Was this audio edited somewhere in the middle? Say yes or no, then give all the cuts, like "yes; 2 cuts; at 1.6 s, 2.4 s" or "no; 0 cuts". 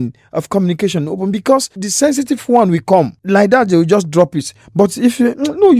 yes; 2 cuts; at 1.8 s, 3.2 s